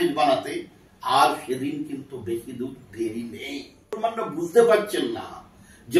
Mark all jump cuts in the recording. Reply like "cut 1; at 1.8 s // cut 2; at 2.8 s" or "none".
cut 1; at 4.0 s